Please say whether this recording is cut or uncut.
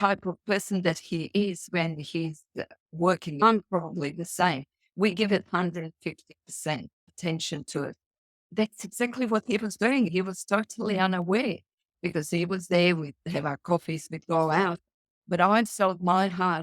cut